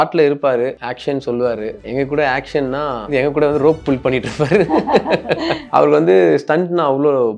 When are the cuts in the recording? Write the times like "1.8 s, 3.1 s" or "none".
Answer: 0.9 s, 1.8 s, 3.1 s, 5.6 s